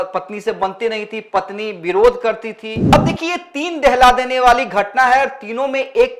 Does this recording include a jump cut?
yes; 1 cut; at 2.9 s

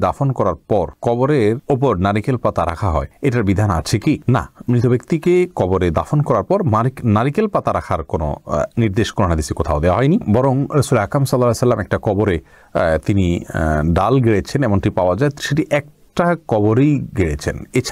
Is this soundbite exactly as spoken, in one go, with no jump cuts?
yes; 0 cuts

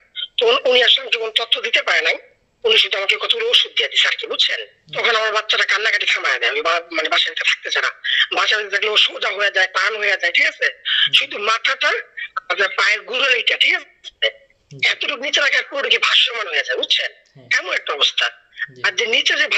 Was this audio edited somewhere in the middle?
yes; 1 cut; at 4.8 s

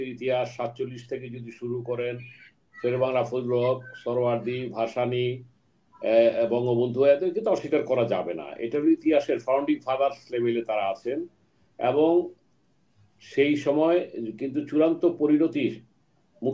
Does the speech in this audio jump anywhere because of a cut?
no; 0 cuts

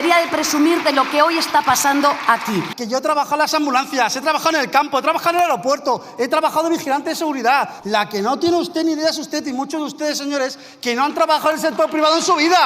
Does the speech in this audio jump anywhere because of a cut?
yes; 2 cuts; at 2.8 s, 7.7 s

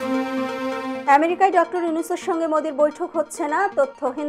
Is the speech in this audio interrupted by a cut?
yes; 1 cut; at 1.0 s

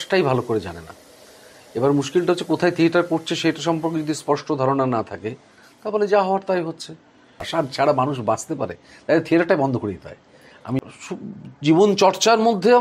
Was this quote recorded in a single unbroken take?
no; 2 cuts; at 7.4 s, 10.8 s

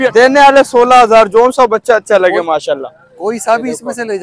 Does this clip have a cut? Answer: no; 0 cuts

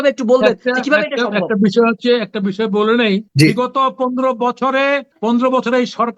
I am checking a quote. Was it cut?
yes; 2 cuts; at 3.3 s, 5.1 s

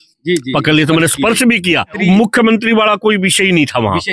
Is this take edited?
yes; 1 cut; at 1.9 s

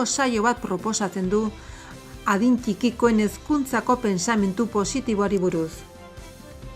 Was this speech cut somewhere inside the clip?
yes; 1 cut; at 5.7 s

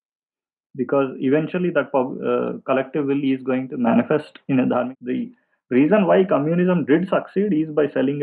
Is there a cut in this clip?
yes; 1 cut; at 4.9 s

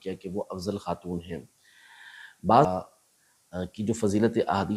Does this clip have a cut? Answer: yes; 1 cut; at 2.7 s

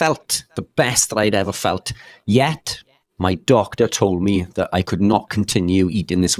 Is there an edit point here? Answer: no; 0 cuts

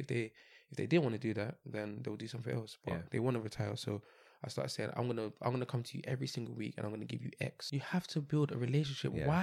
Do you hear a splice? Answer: yes; 1 cut; at 7.7 s

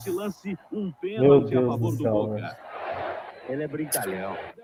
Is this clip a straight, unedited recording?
yes; 0 cuts

